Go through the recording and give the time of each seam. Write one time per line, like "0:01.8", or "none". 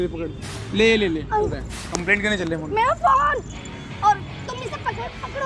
0:01.8